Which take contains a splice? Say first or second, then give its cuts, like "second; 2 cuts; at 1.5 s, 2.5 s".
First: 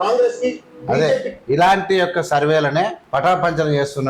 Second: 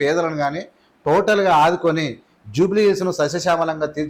first; 1 cut; at 3.0 s